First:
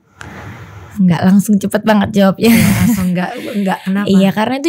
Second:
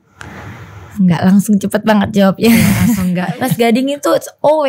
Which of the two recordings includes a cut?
second; 1 cut; at 3.3 s

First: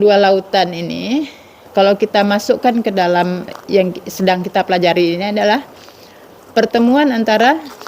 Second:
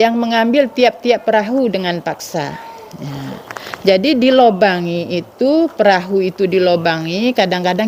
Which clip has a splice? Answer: first; 2 cuts; at 1.7 s, 3.5 s

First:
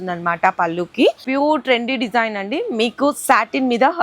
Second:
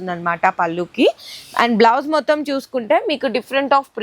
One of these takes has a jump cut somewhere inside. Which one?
first; 1 cut; at 1.2 s

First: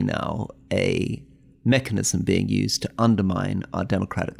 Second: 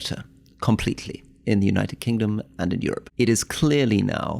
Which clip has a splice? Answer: second; 1 cut; at 3.0 s

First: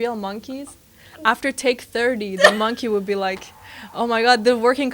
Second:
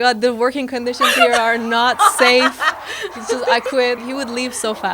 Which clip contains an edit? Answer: second; 1 cut; at 4.0 s

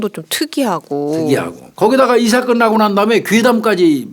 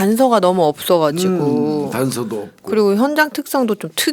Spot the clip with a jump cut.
first; 1 cut; at 1.6 s

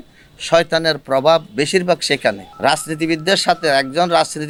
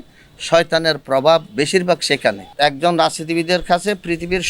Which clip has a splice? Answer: second; 1 cut; at 2.5 s

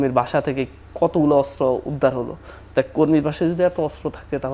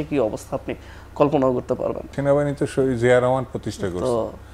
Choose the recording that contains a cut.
second; 1 cut; at 2.1 s

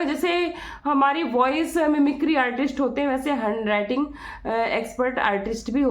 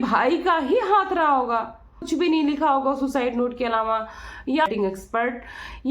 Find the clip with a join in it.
second; 2 cuts; at 2.0 s, 4.7 s

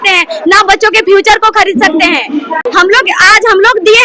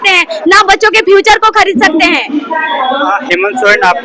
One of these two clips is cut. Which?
first; 1 cut; at 2.6 s

